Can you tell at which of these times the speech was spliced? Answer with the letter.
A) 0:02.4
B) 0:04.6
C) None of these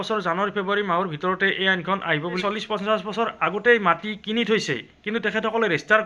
A